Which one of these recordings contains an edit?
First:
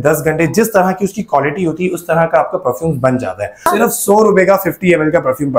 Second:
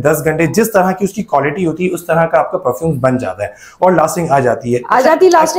first; 1 cut; at 3.7 s

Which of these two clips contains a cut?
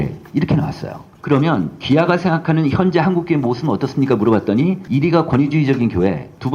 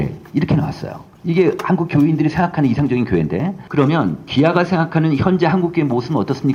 first; 1 cut; at 1.1 s

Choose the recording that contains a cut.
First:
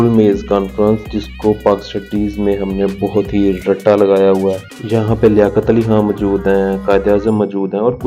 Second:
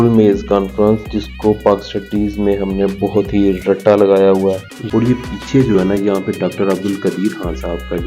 second; 1 cut; at 4.7 s

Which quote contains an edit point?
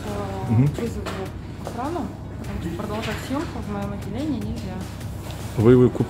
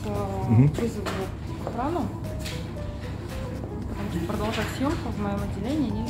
first; 1 cut; at 2.4 s

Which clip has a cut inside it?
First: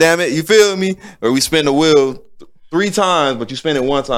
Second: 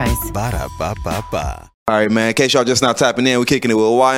second; 1 cut; at 1.9 s

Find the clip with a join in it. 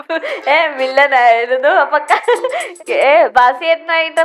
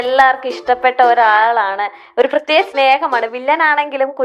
first; 1 cut; at 2.8 s

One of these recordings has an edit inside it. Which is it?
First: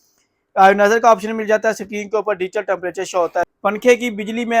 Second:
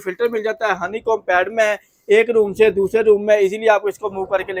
first; 1 cut; at 3.5 s

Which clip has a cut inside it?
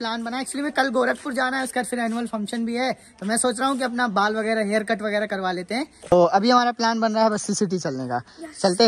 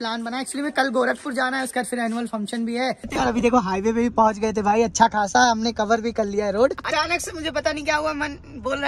second; 2 cuts; at 3.2 s, 6.8 s

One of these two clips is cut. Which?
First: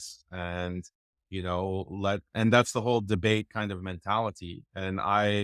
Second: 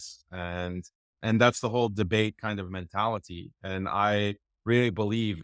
second; 1 cut; at 1.1 s

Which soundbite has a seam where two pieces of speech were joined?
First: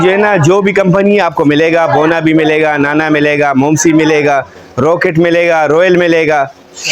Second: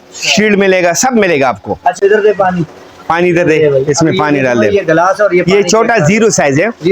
second; 1 cut; at 2.0 s

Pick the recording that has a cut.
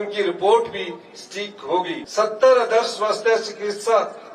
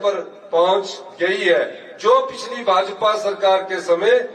first; 1 cut; at 2.0 s

